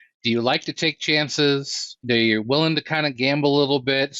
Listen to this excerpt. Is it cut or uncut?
cut